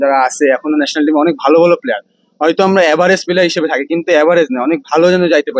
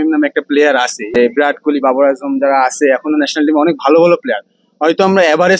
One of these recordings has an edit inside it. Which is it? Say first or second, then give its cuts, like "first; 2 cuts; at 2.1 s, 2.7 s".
second; 1 cut; at 1.1 s